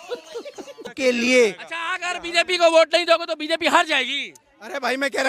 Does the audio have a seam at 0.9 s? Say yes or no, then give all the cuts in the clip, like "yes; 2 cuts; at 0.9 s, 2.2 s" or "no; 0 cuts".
yes; 1 cut; at 0.9 s